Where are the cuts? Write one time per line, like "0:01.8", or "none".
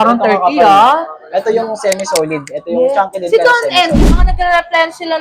0:04.0